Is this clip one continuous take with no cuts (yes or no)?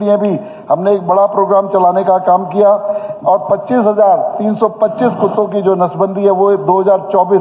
yes